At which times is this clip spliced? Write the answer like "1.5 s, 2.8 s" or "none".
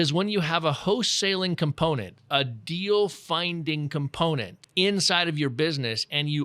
4.6 s